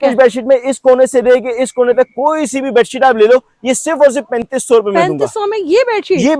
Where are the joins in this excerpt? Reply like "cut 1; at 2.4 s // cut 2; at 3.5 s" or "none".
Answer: none